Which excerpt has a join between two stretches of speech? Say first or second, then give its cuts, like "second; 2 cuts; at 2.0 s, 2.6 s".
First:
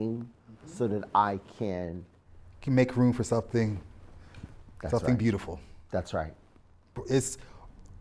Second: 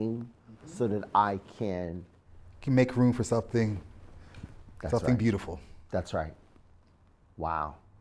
first; 1 cut; at 7.0 s